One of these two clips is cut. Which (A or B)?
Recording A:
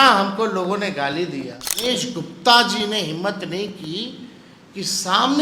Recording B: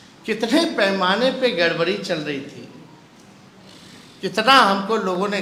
A